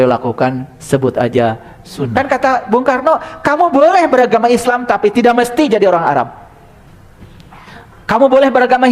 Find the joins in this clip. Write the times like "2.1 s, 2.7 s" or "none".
2.1 s